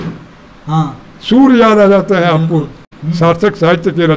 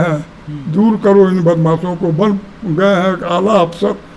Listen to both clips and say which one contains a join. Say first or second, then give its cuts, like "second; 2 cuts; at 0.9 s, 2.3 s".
first; 1 cut; at 2.9 s